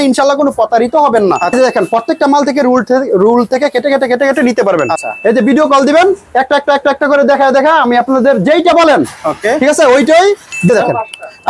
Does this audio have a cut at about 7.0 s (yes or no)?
no